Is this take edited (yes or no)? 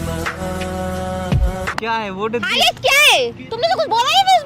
yes